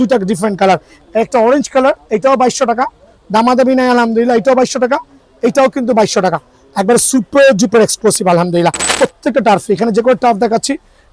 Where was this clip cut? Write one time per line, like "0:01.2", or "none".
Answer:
0:00.9
0:08.9